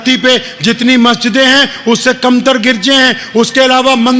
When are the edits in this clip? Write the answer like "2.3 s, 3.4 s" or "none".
none